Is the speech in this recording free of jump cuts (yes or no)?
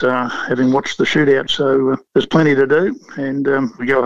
no